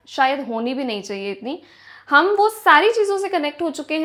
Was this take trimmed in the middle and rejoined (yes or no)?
no